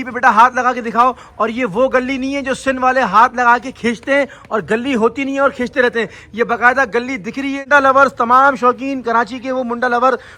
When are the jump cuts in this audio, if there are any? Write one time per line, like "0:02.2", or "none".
0:07.6